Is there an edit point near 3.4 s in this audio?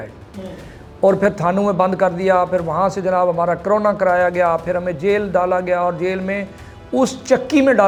no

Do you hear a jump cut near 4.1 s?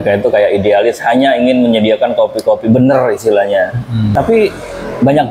yes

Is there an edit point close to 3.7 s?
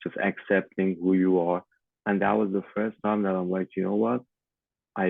no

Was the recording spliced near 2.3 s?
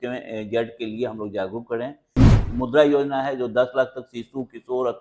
yes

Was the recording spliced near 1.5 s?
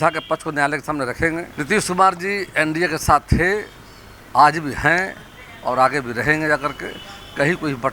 yes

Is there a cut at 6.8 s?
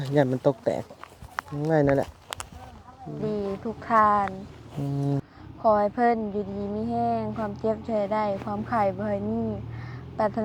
no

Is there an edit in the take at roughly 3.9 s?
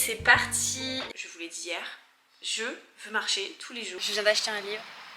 yes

